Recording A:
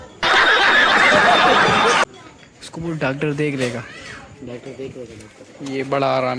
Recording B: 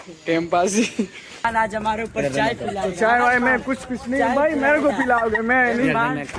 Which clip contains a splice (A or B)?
B